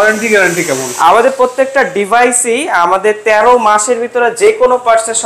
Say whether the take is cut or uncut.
uncut